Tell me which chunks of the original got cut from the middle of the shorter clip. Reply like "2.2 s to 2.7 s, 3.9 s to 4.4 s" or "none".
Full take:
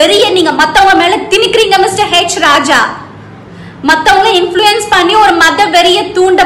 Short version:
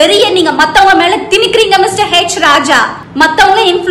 3.0 s to 3.7 s